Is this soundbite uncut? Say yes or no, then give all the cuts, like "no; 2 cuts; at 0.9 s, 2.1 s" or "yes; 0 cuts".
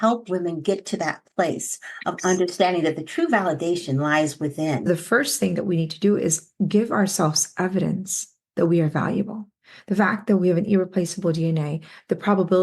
no; 1 cut; at 4.9 s